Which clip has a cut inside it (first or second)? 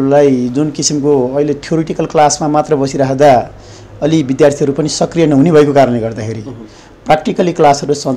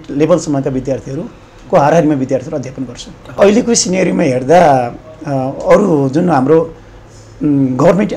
second